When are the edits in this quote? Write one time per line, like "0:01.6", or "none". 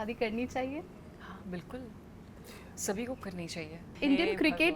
0:01.0
0:03.8